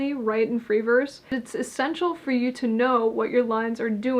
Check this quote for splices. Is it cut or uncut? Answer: cut